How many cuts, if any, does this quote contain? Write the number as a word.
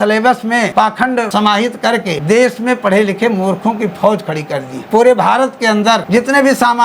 four